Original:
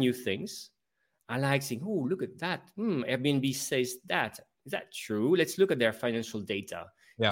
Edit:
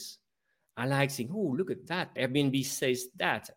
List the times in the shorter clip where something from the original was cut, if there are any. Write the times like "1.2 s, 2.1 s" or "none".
2.2 s